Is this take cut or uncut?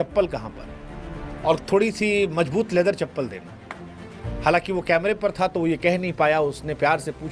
uncut